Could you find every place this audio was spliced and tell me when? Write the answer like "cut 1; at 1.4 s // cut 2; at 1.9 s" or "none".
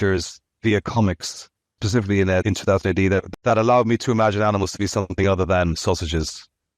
cut 1; at 1.8 s // cut 2; at 2.4 s // cut 3; at 3.3 s

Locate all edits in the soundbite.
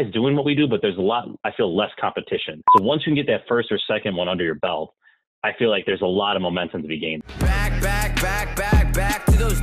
cut 1; at 2.6 s // cut 2; at 7.2 s

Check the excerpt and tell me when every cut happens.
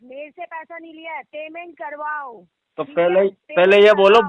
none

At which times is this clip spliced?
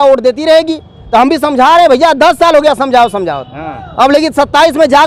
none

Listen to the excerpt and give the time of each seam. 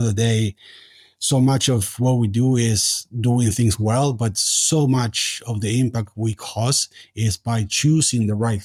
none

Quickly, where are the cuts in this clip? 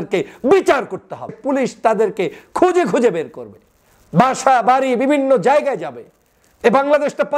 cut 1; at 1.4 s

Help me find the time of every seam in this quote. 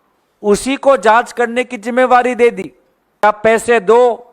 cut 1; at 3.2 s

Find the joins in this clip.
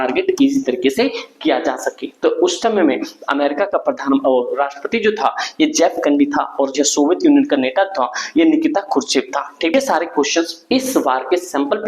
cut 1; at 9.7 s

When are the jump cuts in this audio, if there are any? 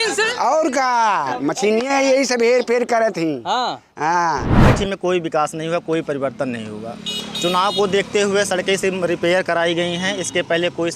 cut 1; at 4.5 s

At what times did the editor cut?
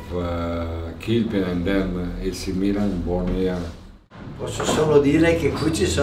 none

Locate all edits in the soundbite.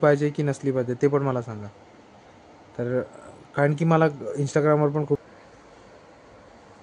cut 1; at 5.2 s

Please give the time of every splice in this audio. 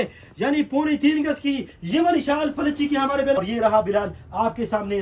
cut 1; at 3.4 s

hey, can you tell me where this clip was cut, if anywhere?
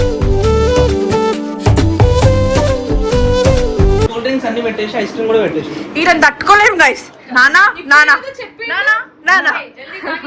cut 1; at 4.1 s

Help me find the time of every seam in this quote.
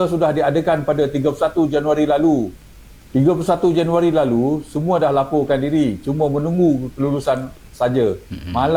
none

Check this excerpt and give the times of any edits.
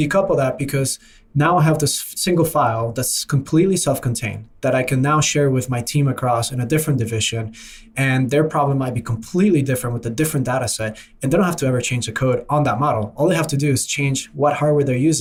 none

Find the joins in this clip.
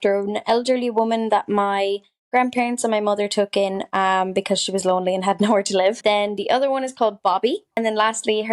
cut 1; at 6.0 s // cut 2; at 7.8 s

